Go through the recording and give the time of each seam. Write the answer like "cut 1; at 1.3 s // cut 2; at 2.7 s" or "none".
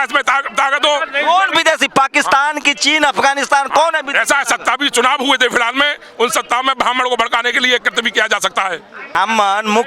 none